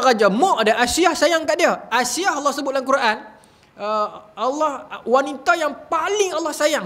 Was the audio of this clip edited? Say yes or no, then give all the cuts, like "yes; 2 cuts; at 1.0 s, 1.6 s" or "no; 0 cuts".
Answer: no; 0 cuts